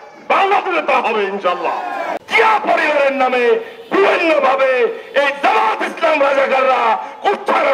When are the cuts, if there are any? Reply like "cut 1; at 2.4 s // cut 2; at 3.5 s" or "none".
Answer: cut 1; at 2.1 s